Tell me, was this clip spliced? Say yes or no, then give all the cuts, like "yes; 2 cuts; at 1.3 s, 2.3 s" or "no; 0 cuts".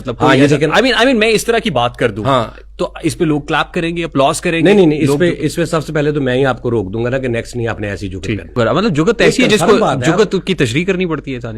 yes; 1 cut; at 8.6 s